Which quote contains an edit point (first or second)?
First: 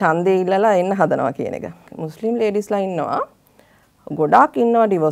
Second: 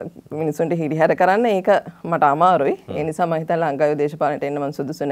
first